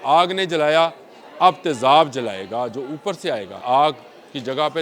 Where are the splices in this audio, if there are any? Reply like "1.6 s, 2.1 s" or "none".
3.6 s